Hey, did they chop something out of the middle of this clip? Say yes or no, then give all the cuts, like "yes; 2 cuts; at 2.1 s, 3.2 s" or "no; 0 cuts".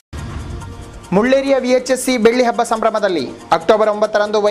yes; 1 cut; at 1.0 s